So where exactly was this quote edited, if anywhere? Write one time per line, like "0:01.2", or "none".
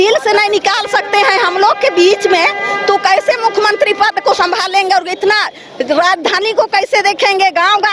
none